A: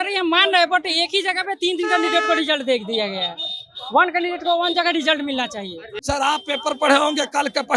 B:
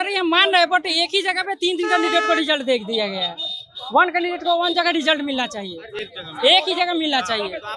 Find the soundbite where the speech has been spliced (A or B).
A